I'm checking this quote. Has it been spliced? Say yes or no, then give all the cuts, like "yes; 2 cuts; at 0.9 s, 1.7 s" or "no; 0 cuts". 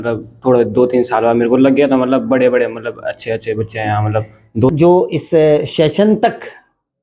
yes; 1 cut; at 4.7 s